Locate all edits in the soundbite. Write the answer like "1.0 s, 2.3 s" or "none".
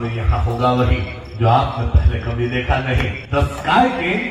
3.2 s